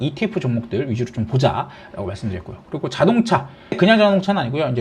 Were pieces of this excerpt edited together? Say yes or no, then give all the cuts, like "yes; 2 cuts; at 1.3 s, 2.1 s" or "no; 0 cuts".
yes; 1 cut; at 3.8 s